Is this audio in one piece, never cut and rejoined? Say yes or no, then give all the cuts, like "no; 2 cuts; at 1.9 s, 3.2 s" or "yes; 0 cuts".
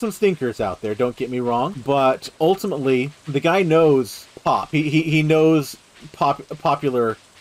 no; 3 cuts; at 1.8 s, 3.2 s, 4.2 s